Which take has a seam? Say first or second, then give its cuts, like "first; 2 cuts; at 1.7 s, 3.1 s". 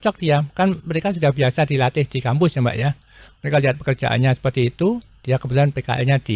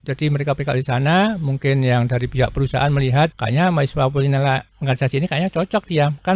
second; 2 cuts; at 3.4 s, 4.7 s